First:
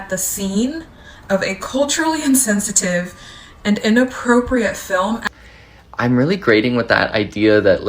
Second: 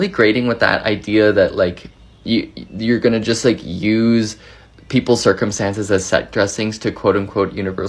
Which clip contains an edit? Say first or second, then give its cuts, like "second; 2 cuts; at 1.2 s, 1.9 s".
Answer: first; 1 cut; at 5.3 s